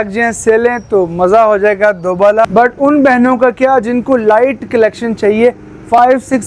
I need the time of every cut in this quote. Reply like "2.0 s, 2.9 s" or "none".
2.5 s